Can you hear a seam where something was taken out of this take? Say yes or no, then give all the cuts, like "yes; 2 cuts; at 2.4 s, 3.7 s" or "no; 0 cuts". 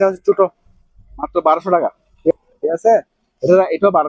yes; 1 cut; at 2.3 s